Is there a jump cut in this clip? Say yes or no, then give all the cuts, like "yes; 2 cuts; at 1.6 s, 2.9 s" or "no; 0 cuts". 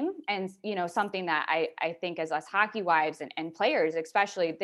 no; 0 cuts